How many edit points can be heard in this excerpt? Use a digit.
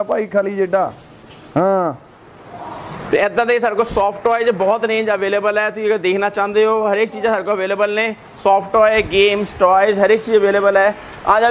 0